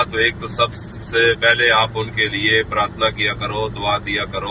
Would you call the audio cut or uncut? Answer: uncut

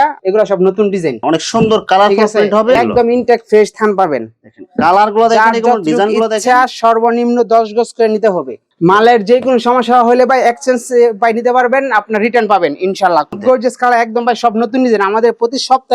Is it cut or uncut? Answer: cut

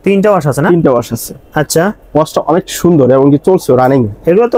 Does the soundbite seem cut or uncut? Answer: uncut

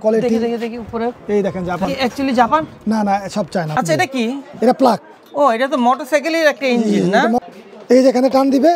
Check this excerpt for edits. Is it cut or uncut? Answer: cut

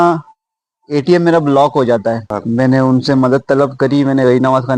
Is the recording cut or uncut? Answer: cut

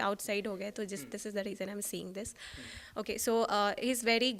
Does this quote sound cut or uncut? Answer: uncut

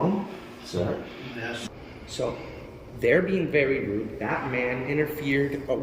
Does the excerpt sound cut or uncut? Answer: cut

